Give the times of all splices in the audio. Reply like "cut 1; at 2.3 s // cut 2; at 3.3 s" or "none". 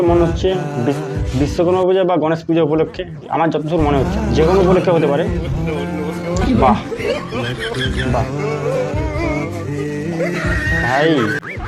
none